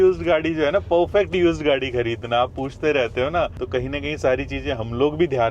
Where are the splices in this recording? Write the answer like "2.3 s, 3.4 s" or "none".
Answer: 3.6 s